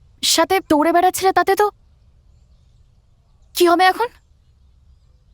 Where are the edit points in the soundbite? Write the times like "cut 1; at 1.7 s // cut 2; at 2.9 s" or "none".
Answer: none